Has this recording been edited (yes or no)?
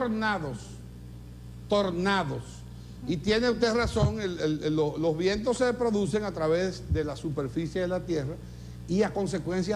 yes